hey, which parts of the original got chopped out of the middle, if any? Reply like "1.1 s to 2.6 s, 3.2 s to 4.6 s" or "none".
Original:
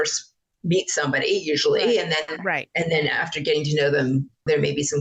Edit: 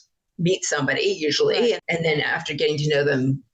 2.1 s to 2.7 s